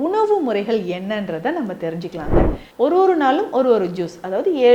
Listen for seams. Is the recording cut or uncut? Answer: cut